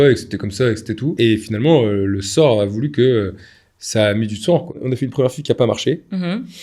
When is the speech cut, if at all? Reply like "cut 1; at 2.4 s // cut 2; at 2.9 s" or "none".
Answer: cut 1; at 1.1 s // cut 2; at 4.7 s